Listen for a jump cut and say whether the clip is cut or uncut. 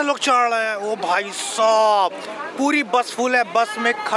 uncut